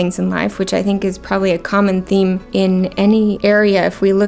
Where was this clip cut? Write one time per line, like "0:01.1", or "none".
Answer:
0:02.4
0:03.4